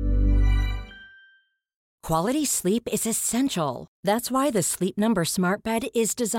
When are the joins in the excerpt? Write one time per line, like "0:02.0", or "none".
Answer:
0:01.9

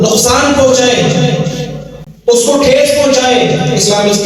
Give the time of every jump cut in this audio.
none

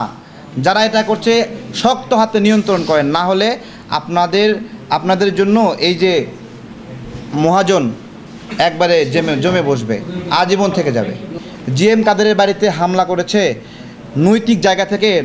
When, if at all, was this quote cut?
0:11.3

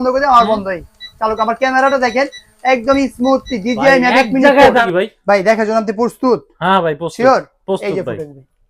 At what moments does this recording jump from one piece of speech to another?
0:04.8

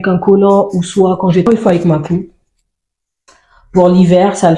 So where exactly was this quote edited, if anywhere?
0:01.5

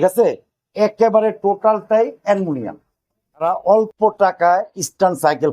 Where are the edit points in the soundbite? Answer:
0:03.4

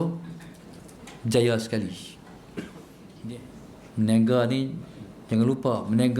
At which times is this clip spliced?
0:03.1

